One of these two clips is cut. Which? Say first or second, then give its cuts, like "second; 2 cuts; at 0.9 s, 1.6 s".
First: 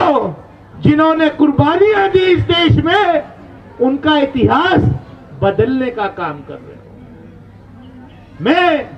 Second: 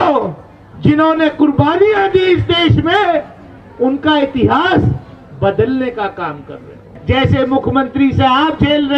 second; 1 cut; at 6.9 s